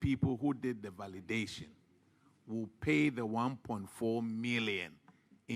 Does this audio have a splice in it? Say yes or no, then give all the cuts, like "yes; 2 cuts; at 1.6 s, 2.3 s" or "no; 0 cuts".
no; 0 cuts